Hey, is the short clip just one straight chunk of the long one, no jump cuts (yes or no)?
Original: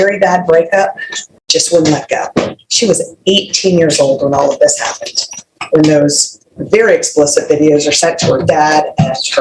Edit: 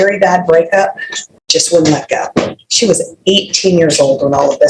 yes